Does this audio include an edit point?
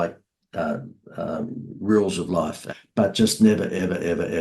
yes; 1 cut; at 2.6 s

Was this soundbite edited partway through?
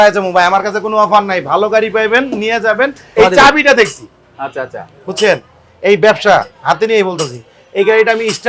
yes; 1 cut; at 3.0 s

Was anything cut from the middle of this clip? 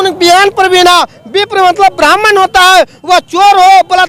no; 0 cuts

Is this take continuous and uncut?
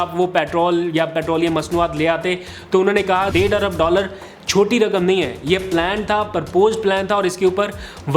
no; 1 cut; at 3.3 s

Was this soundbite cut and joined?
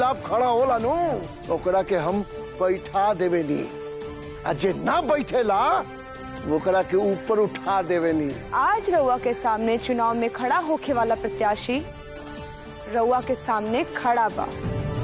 yes; 2 cuts; at 1.3 s, 8.4 s

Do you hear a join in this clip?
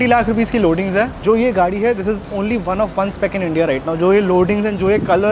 yes; 1 cut; at 1.1 s

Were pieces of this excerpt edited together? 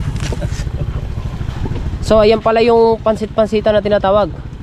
no; 0 cuts

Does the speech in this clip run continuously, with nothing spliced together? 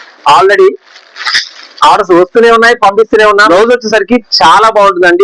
no; 1 cut; at 3.3 s

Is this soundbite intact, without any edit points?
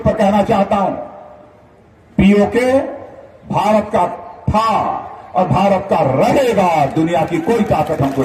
yes; 0 cuts

